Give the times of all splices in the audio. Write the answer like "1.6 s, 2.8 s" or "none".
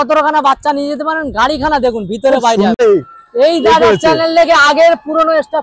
2.8 s